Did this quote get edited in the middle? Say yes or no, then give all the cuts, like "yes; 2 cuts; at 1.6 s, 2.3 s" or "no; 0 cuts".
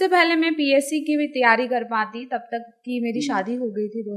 no; 0 cuts